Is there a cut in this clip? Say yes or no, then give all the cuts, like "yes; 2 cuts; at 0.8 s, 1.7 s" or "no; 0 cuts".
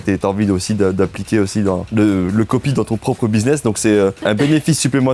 yes; 2 cuts; at 1.9 s, 4.2 s